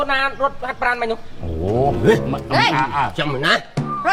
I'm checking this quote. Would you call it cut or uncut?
uncut